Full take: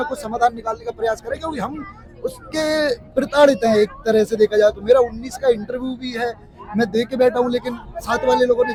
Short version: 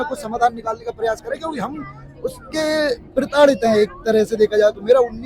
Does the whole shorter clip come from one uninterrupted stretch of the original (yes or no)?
yes